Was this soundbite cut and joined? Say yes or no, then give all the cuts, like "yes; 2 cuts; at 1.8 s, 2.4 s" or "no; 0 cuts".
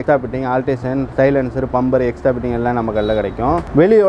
no; 0 cuts